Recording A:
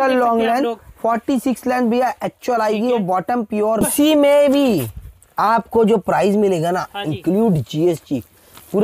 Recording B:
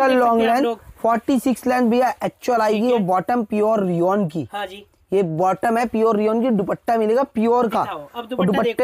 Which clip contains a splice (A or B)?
A